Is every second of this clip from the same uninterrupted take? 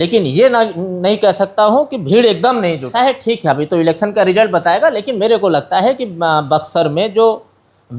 no; 1 cut; at 2.9 s

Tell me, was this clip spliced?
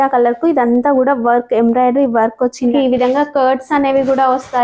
yes; 1 cut; at 2.7 s

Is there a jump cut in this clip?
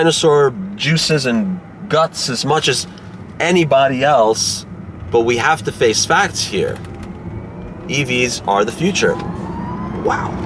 no; 0 cuts

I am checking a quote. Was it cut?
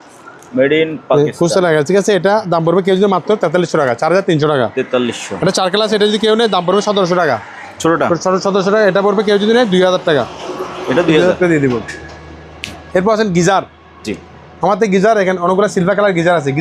no; 0 cuts

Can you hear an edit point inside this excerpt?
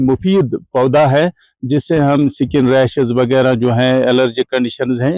no; 0 cuts

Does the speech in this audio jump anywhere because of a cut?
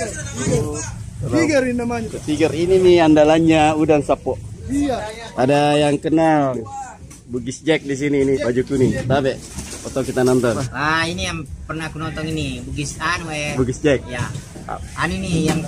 yes; 3 cuts; at 5.1 s, 8.4 s, 10.7 s

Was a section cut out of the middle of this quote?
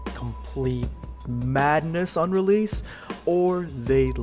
yes; 1 cut; at 0.9 s

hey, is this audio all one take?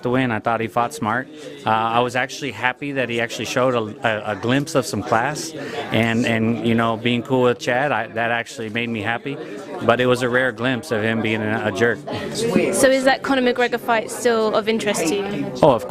no; 1 cut; at 5.4 s

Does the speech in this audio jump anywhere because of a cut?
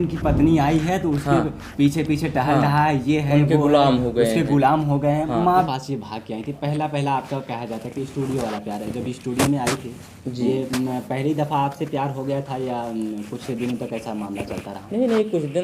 yes; 1 cut; at 5.7 s

